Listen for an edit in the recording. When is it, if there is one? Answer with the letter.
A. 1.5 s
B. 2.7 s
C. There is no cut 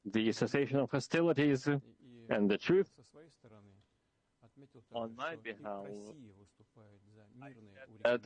C